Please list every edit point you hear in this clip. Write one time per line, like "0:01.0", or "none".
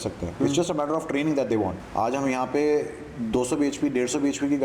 0:01.8

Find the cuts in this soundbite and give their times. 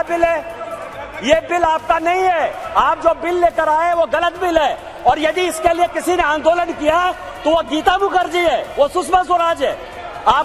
none

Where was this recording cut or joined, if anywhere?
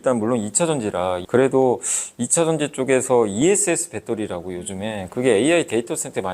0:01.2

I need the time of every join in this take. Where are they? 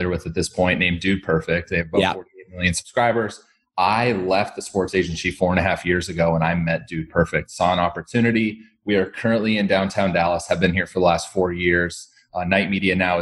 none

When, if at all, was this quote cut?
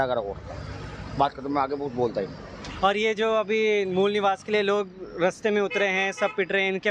none

